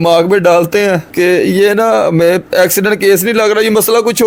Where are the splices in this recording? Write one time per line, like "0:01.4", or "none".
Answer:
none